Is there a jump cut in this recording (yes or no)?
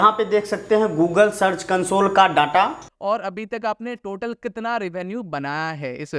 yes